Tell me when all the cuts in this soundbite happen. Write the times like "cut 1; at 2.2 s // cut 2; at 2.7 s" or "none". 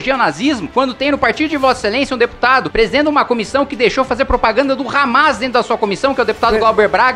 cut 1; at 2.7 s